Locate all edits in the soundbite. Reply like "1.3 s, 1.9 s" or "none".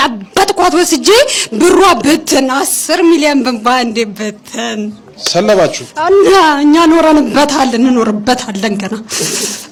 none